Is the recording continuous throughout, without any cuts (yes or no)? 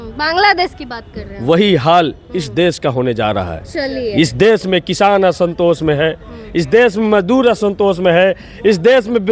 yes